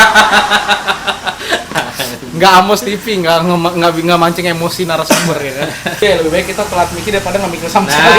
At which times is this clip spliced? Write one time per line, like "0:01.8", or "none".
0:06.0